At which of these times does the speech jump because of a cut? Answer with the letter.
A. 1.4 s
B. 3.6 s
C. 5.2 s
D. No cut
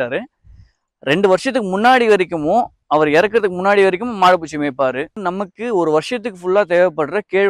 C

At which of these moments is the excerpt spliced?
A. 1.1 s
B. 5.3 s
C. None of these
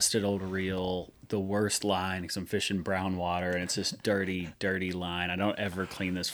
C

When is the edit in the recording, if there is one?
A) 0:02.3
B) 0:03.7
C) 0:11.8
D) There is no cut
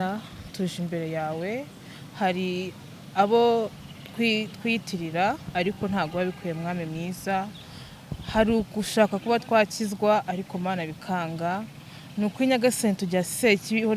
D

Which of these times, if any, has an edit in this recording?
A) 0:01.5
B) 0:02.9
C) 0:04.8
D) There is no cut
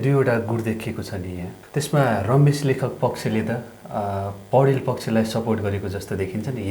A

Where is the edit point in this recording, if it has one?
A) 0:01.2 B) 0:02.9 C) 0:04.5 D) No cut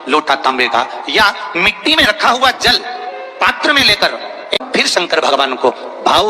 C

